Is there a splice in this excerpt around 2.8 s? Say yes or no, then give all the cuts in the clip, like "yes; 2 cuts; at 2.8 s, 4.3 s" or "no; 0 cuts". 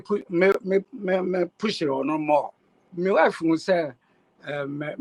yes; 1 cut; at 2.8 s